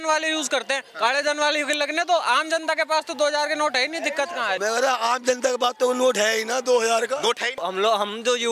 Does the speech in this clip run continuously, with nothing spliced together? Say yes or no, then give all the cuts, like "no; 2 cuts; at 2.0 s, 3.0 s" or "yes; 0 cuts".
no; 2 cuts; at 4.6 s, 7.6 s